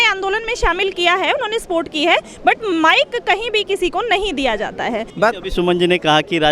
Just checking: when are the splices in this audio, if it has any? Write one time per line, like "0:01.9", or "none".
0:05.1